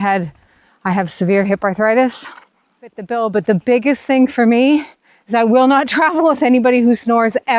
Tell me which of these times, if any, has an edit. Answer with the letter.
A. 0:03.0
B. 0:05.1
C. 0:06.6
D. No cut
A